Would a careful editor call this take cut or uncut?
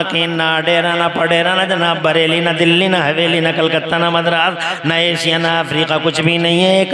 uncut